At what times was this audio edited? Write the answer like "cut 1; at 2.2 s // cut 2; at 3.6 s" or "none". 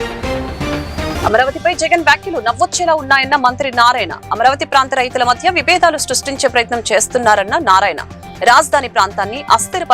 cut 1; at 1.1 s